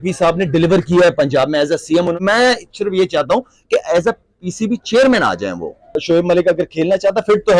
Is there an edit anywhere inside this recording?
yes; 2 cuts; at 2.2 s, 6.0 s

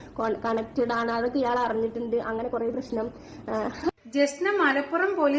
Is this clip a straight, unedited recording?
no; 1 cut; at 3.9 s

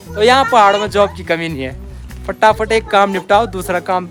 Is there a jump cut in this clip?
no; 0 cuts

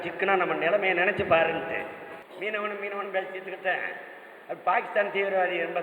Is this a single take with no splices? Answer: no; 1 cut; at 2.2 s

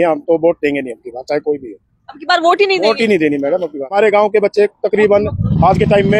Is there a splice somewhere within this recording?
yes; 1 cut; at 3.9 s

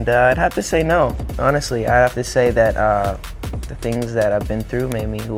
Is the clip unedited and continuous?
yes; 0 cuts

